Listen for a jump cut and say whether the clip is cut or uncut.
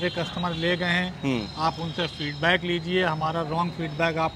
uncut